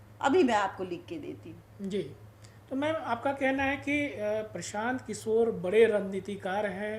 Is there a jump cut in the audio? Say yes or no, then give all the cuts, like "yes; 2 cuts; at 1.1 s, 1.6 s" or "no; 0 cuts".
no; 0 cuts